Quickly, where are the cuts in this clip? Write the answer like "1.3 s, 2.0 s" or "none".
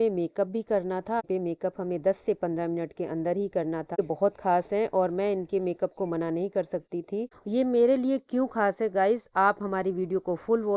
1.2 s, 4.0 s, 7.4 s